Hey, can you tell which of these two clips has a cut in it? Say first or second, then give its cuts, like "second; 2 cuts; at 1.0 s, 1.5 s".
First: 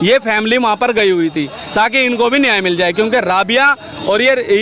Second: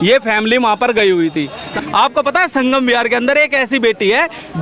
second; 1 cut; at 1.6 s